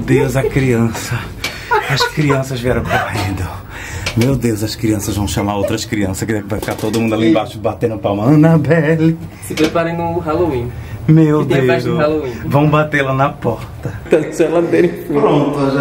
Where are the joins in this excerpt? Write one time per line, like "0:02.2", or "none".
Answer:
0:14.0